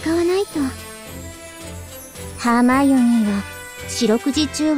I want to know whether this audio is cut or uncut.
cut